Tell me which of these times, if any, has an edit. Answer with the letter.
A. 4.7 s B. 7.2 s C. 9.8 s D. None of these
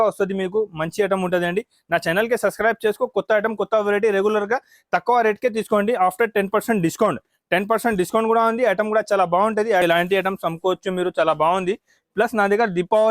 C